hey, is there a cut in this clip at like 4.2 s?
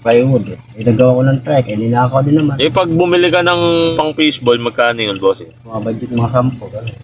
no; 2 cuts; at 2.5 s, 5.7 s

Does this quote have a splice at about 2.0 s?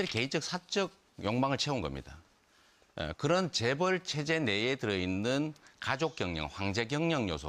yes; 1 cut; at 2.0 s

